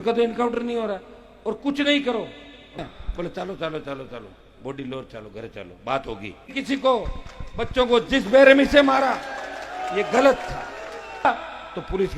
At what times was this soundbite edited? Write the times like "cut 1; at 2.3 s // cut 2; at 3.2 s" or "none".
cut 1; at 2.8 s // cut 2; at 6.5 s // cut 3; at 11.2 s